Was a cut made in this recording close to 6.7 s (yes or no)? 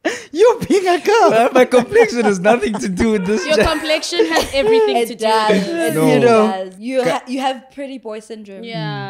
yes